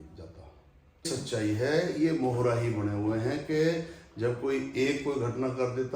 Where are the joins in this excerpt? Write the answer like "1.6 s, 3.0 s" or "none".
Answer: 1.1 s